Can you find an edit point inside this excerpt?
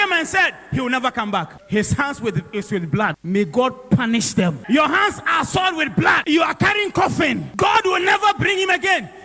yes; 5 cuts; at 1.6 s, 3.2 s, 4.6 s, 6.2 s, 7.5 s

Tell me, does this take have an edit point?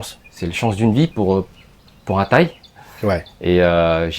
no; 0 cuts

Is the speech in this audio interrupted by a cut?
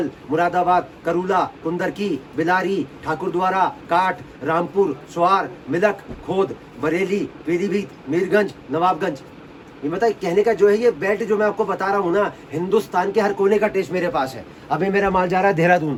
no; 0 cuts

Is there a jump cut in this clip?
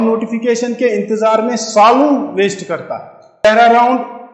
yes; 1 cut; at 3.4 s

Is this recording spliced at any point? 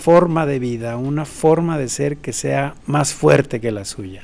no; 0 cuts

